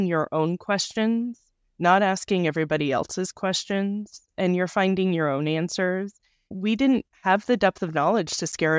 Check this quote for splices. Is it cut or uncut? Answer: cut